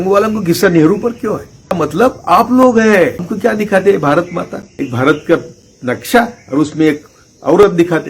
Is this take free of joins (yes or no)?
no